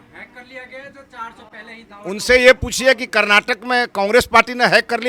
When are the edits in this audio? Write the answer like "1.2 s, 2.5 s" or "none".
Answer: none